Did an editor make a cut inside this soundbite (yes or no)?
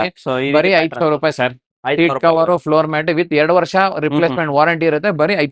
no